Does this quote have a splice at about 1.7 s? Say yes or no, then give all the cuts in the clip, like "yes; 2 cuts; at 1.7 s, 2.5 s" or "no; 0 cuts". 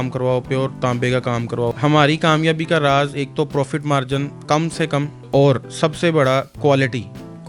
yes; 2 cuts; at 1.7 s, 5.2 s